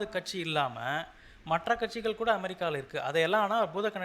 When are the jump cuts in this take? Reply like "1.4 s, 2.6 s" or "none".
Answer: none